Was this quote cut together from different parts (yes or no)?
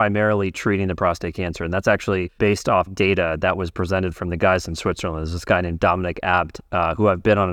yes